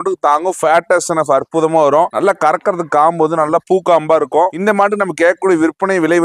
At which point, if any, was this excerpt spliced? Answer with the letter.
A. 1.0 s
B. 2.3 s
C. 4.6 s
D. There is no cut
C